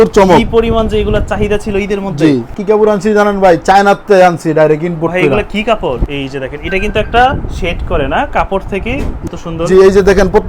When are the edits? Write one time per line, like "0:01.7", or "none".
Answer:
0:02.5
0:06.1
0:09.2